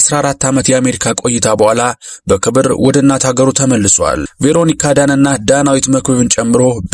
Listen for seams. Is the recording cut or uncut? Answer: cut